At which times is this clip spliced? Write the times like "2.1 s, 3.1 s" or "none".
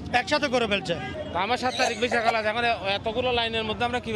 none